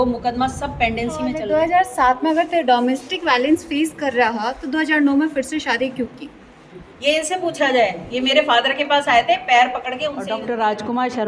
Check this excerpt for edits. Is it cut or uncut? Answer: cut